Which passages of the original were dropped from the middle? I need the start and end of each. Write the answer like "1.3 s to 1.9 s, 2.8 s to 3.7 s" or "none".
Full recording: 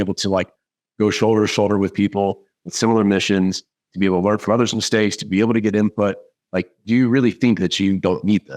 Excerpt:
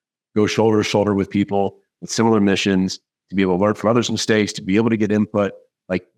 none